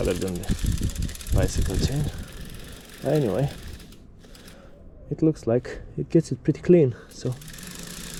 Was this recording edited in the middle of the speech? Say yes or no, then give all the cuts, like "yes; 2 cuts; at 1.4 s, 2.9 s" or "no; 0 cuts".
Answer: no; 0 cuts